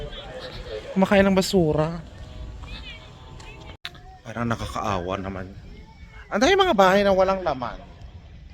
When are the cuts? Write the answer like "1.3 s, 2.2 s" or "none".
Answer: none